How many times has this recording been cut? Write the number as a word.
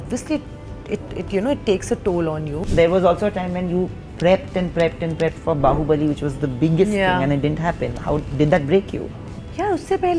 one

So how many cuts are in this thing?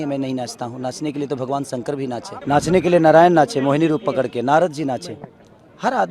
one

